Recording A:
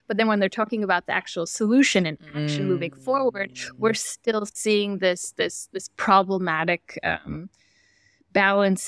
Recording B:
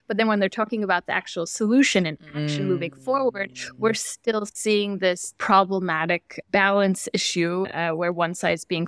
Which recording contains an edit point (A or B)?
B